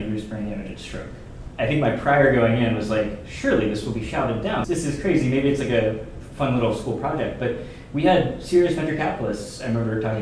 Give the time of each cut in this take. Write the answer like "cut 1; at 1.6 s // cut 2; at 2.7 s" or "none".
none